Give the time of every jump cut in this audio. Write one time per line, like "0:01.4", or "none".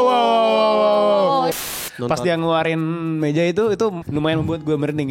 0:01.5
0:04.0